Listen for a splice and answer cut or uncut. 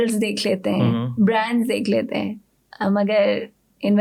uncut